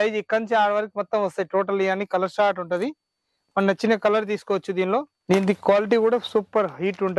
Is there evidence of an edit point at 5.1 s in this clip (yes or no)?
yes